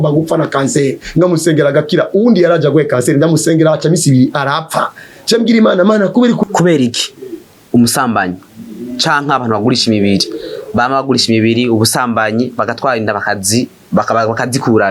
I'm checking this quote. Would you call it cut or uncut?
cut